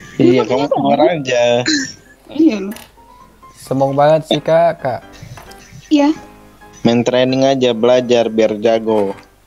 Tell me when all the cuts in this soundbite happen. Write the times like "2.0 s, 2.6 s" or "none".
none